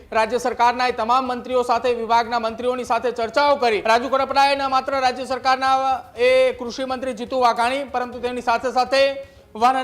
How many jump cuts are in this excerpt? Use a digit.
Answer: 1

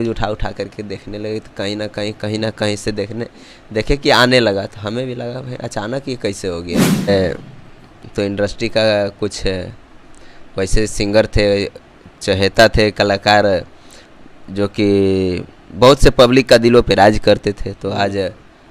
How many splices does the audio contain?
1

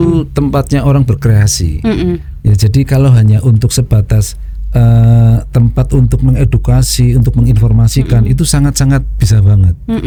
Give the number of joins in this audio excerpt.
0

